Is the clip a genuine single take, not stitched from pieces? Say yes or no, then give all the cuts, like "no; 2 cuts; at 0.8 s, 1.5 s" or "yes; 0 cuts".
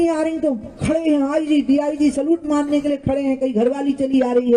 yes; 0 cuts